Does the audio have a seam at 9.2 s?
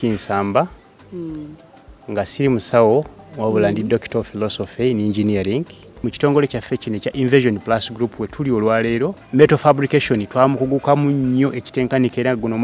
yes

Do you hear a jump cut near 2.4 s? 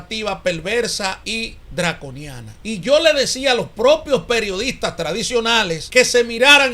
yes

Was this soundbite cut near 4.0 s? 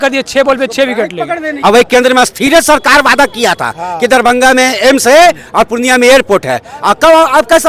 no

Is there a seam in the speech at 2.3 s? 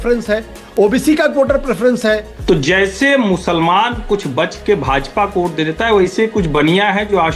yes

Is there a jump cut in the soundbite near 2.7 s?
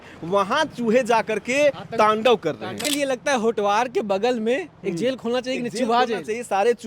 yes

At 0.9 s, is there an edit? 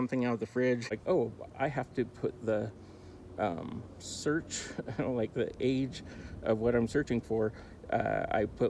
yes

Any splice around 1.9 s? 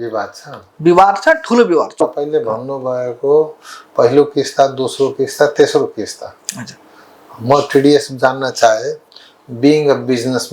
yes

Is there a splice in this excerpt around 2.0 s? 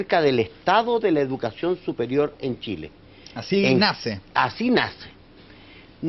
no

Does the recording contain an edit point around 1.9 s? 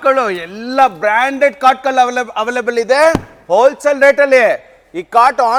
no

